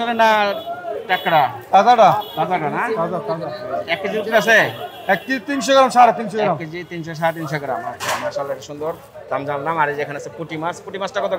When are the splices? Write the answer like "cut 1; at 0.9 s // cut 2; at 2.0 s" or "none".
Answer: none

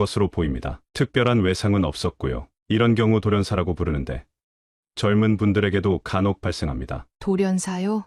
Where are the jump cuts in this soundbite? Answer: none

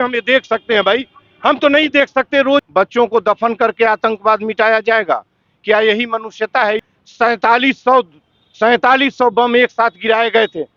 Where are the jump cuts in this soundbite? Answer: cut 1; at 2.7 s // cut 2; at 7.0 s

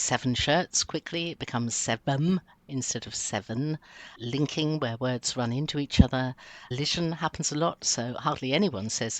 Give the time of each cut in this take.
cut 1; at 4.1 s // cut 2; at 6.7 s

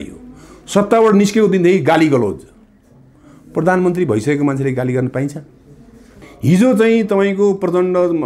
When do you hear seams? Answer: cut 1; at 6.3 s

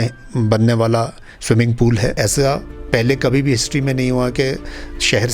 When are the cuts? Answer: cut 1; at 2.2 s

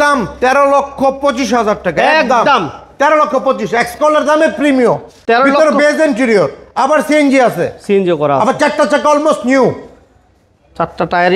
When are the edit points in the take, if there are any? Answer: none

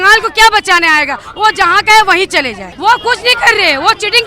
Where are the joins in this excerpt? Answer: cut 1; at 2.7 s

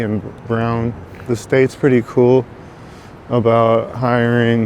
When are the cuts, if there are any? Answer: cut 1; at 1.1 s

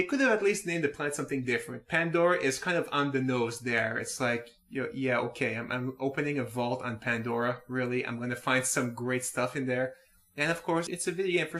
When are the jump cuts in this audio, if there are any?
cut 1; at 9.0 s

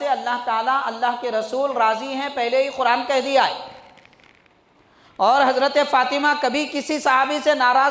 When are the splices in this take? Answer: none

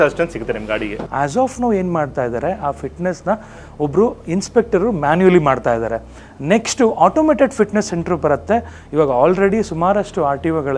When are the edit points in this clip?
cut 1; at 1.0 s

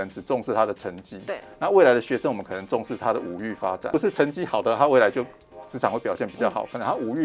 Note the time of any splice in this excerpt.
cut 1; at 3.9 s

